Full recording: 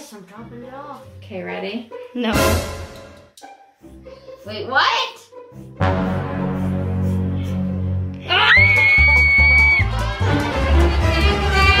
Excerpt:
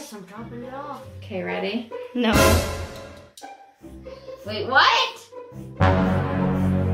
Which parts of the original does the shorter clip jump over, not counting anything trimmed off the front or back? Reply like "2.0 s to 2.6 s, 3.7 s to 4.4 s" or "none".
none